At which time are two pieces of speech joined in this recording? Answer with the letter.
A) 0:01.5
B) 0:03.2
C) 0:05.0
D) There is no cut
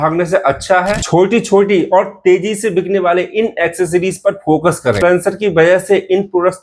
C